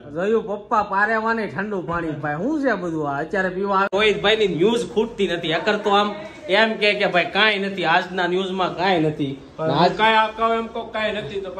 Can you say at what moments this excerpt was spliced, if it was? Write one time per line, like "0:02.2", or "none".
0:03.9